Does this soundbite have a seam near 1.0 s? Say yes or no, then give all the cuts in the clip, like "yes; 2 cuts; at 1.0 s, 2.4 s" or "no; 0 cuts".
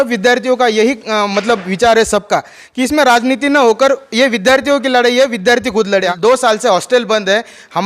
no; 1 cut; at 6.1 s